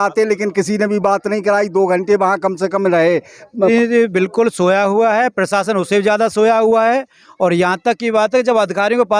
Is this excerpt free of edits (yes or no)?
no